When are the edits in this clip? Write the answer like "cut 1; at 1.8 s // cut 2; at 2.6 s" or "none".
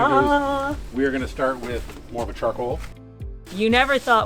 cut 1; at 2.0 s // cut 2; at 3.0 s